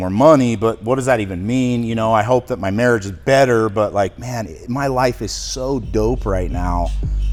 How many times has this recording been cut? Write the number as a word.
zero